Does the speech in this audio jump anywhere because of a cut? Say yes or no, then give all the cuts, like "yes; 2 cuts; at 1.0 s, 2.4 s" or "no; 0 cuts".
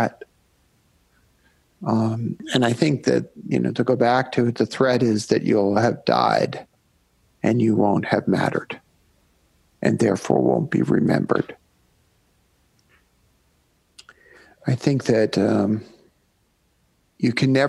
no; 0 cuts